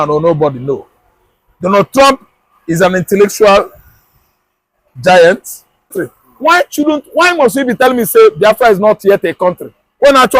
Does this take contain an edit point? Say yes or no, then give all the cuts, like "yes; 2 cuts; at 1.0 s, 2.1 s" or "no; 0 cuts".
yes; 1 cut; at 5.9 s